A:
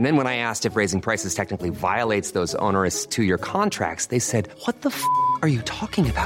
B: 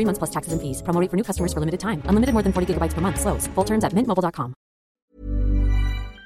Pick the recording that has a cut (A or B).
B